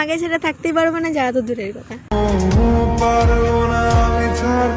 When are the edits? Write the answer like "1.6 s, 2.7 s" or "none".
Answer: none